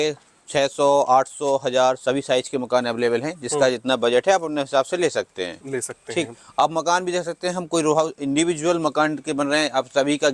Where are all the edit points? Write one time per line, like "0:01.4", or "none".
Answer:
none